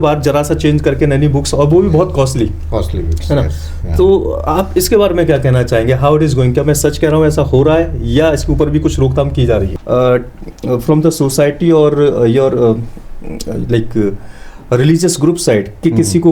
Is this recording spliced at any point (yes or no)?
yes